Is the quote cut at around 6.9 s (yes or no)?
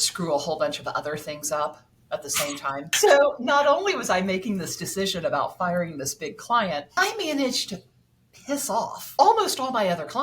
yes